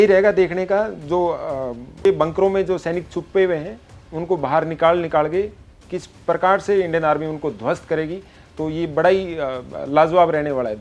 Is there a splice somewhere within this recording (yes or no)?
yes